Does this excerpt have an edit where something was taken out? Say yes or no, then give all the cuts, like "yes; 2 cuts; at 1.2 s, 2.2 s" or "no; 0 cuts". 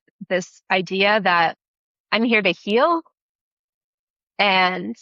no; 0 cuts